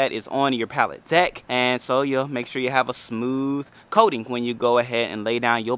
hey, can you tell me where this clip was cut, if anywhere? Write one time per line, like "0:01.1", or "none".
0:01.4